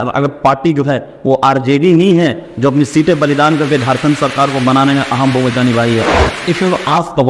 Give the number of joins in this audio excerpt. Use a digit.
1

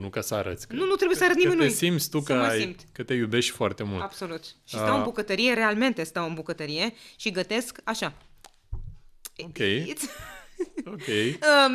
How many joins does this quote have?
0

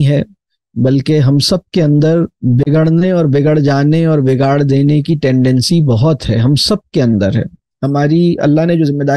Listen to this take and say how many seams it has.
2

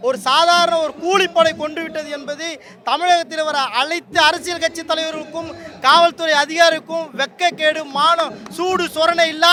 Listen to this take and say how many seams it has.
0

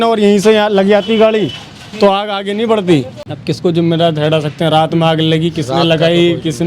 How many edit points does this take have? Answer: 1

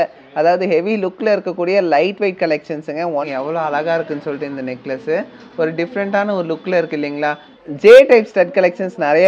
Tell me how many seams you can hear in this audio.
2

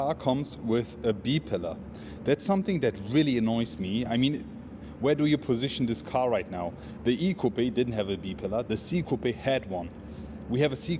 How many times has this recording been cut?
0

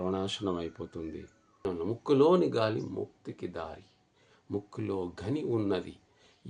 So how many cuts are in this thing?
1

